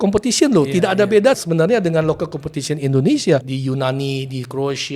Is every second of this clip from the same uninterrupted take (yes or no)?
no